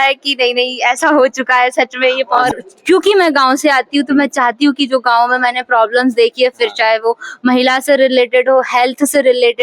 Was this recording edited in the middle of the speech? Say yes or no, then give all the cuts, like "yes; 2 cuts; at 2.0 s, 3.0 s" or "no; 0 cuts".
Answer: yes; 1 cut; at 2.3 s